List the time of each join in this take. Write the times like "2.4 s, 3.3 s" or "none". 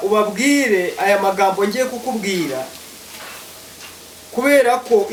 none